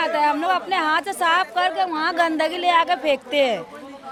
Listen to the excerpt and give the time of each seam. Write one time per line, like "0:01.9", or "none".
none